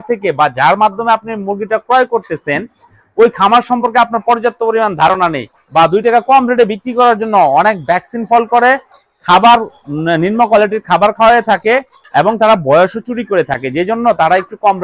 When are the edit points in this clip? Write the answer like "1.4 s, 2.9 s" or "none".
5.6 s